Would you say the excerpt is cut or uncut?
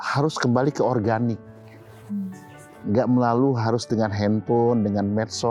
uncut